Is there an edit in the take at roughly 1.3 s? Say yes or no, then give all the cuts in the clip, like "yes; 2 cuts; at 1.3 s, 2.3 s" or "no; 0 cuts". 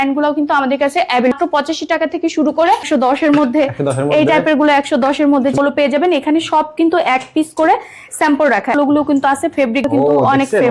yes; 5 cuts; at 1.3 s, 2.9 s, 5.5 s, 8.7 s, 9.9 s